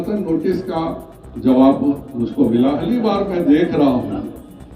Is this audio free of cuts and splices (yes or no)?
no